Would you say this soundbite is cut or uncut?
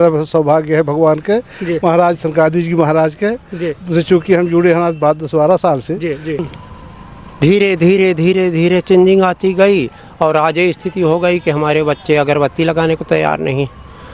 cut